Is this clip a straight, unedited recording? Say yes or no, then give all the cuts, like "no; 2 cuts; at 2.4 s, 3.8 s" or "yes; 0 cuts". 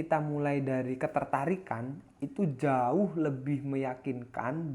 yes; 0 cuts